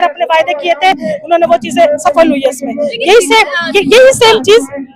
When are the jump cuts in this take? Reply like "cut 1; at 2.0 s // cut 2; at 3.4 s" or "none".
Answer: none